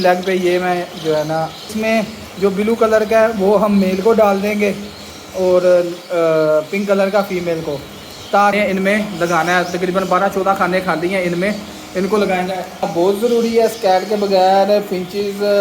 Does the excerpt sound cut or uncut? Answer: cut